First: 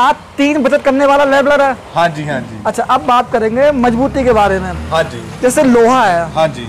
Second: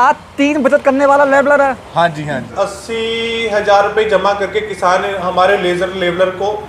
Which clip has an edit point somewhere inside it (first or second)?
second